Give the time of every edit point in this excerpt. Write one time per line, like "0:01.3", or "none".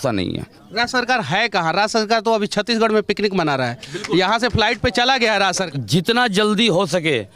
0:05.7